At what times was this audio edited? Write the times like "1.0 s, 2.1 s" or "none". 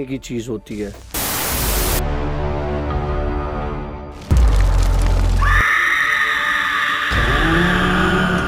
none